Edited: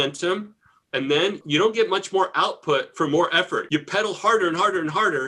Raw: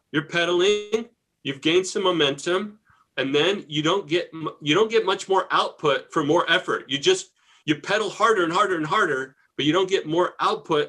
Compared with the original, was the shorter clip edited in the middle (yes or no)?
yes